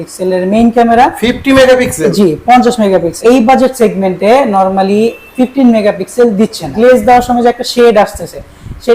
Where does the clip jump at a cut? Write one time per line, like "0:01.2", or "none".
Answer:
0:03.1
0:06.7